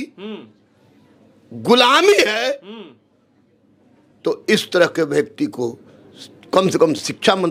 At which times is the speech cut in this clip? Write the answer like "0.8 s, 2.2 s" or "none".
none

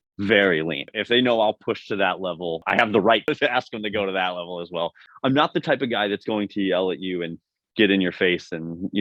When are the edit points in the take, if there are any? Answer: 0.8 s, 2.6 s, 3.3 s, 5.0 s

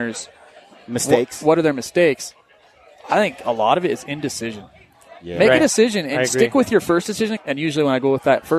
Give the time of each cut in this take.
7.3 s

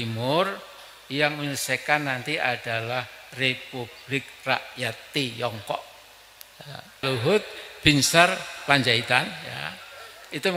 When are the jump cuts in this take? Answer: 7.0 s

